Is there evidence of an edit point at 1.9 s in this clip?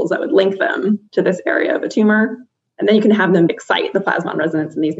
no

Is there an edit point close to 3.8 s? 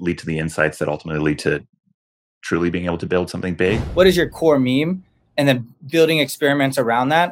yes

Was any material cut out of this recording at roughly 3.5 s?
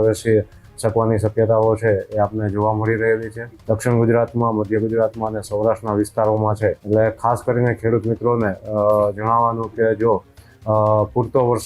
yes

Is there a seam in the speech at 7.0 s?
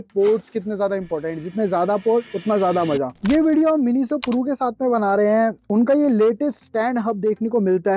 no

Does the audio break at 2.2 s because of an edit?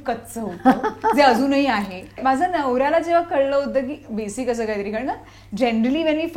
yes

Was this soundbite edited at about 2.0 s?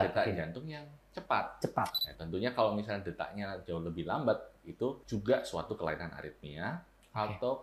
yes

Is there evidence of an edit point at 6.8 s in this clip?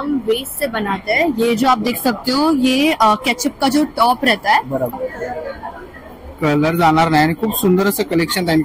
no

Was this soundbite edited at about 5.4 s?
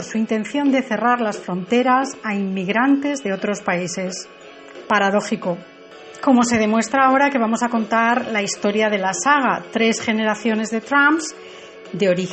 yes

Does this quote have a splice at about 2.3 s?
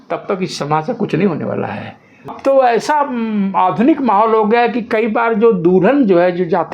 yes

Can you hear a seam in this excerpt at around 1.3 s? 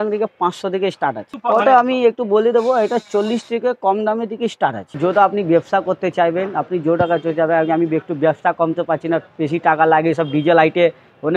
yes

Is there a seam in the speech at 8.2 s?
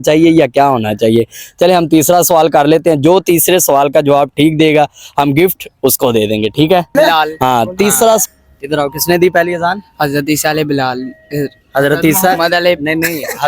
yes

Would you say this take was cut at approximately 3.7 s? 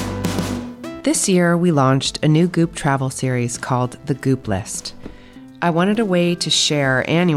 no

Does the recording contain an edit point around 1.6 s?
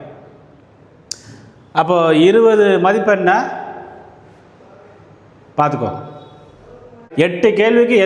no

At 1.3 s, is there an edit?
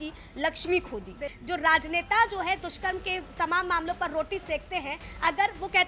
yes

